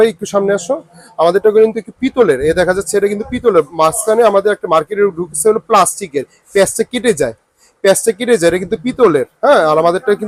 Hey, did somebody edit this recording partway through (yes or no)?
no